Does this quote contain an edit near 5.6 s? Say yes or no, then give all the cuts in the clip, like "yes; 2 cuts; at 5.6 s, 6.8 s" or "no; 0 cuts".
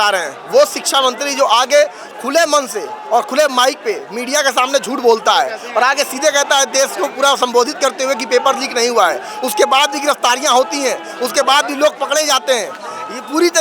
no; 0 cuts